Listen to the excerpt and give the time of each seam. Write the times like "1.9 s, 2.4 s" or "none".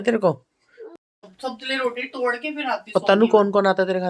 0.9 s